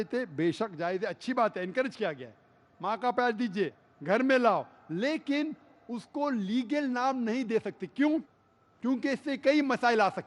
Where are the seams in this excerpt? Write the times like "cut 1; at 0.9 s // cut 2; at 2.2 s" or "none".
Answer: cut 1; at 4.7 s